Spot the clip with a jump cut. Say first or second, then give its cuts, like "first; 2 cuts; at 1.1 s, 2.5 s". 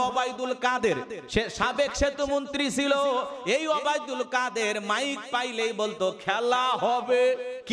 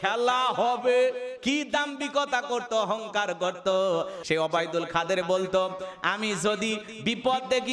second; 1 cut; at 4.2 s